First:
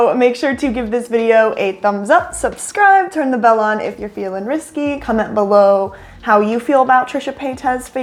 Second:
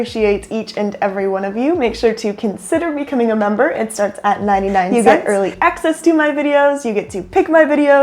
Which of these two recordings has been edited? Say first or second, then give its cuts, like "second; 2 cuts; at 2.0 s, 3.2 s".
second; 1 cut; at 4.9 s